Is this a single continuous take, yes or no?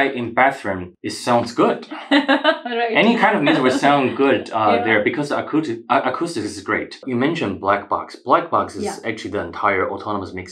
no